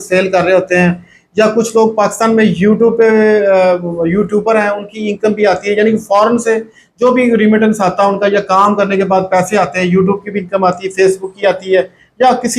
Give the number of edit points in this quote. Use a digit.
0